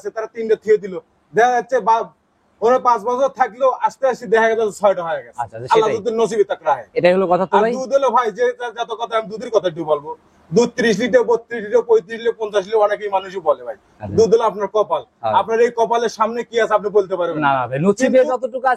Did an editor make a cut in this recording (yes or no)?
no